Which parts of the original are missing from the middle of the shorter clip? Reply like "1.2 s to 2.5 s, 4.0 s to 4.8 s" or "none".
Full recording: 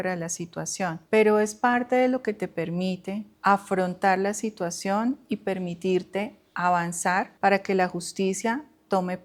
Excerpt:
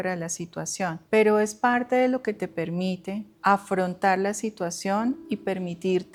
none